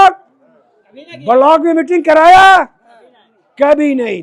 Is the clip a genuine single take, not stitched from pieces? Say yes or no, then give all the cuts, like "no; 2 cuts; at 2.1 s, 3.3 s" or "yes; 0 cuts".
yes; 0 cuts